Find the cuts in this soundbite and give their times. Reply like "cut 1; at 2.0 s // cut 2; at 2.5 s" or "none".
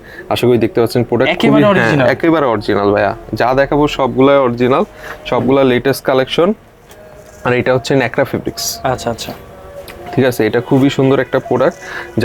none